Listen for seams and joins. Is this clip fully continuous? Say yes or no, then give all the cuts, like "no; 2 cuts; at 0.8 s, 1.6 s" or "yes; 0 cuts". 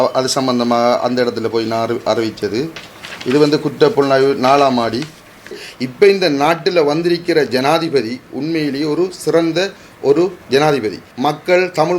no; 2 cuts; at 5.6 s, 11.0 s